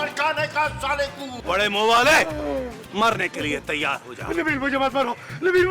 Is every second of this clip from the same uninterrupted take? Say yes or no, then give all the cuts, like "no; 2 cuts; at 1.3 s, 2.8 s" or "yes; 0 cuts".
no; 1 cut; at 1.4 s